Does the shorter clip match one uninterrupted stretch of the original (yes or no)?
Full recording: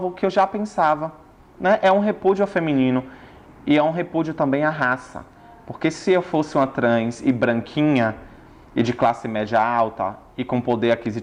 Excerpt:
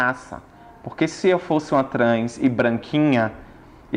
yes